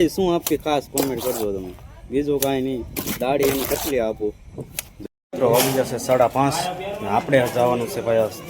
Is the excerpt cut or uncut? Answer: cut